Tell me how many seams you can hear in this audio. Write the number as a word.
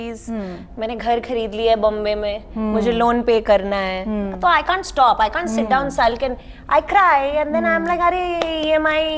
zero